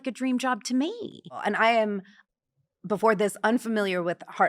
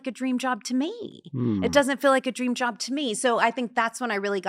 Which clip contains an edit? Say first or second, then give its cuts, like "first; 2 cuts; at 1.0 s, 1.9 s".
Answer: first; 1 cut; at 1.3 s